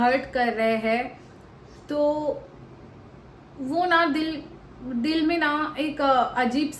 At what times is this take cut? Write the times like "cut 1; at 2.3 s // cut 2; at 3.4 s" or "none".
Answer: none